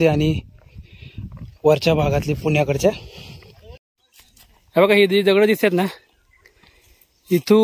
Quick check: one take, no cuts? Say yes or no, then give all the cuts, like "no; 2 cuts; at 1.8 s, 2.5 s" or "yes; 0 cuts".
no; 1 cut; at 3.8 s